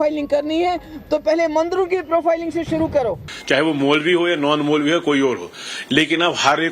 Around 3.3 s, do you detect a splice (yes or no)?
yes